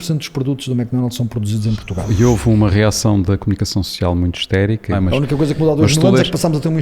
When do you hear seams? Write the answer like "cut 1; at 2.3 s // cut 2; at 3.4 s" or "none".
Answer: cut 1; at 2.1 s // cut 2; at 5.0 s